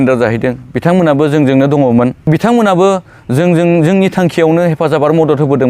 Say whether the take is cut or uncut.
cut